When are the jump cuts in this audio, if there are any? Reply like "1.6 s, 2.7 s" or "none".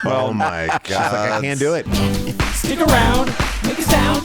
1.9 s